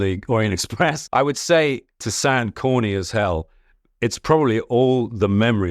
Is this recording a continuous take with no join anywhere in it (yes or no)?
no